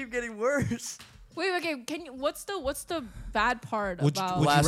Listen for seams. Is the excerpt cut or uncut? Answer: uncut